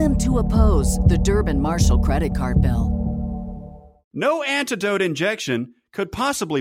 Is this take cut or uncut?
cut